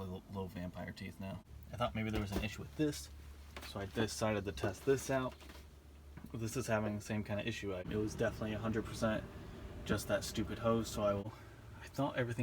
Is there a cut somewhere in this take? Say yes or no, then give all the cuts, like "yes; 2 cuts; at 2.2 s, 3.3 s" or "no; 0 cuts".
yes; 3 cuts; at 1.6 s, 7.9 s, 11.3 s